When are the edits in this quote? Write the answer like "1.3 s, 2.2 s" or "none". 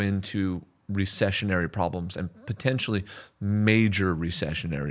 none